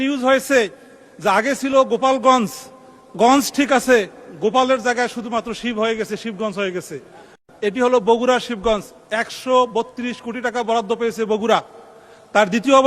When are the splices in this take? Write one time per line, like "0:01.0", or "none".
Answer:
0:07.3